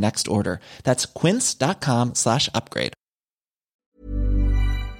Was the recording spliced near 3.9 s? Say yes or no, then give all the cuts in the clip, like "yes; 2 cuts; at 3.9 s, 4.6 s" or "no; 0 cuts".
yes; 1 cut; at 3.9 s